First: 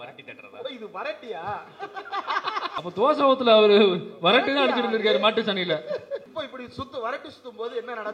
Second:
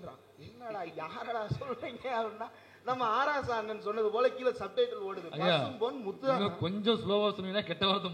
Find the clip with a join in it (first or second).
first